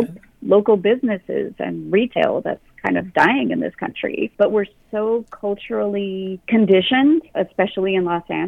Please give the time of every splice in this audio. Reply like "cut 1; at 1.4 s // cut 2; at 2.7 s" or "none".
cut 1; at 4.3 s // cut 2; at 6.4 s // cut 3; at 7.3 s

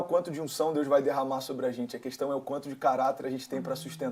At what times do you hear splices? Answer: none

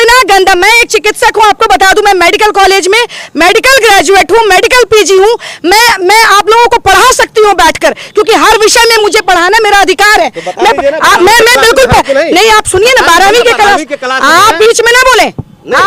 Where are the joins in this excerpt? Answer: none

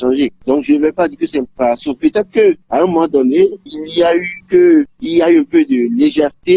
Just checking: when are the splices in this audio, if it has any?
none

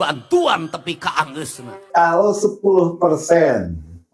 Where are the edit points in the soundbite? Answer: cut 1; at 1.8 s

